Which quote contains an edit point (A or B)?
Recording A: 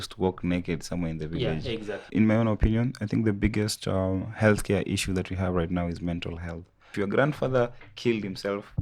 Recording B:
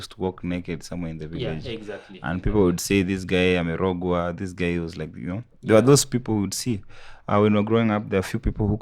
A